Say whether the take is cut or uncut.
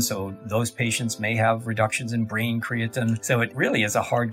cut